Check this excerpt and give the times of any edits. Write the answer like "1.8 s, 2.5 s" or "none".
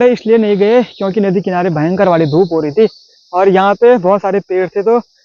none